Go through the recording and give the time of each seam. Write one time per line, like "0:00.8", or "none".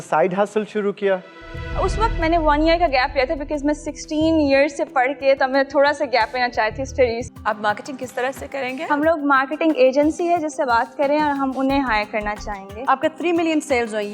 none